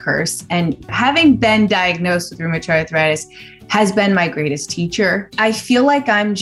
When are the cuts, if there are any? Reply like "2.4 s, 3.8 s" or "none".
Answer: 0.9 s, 5.3 s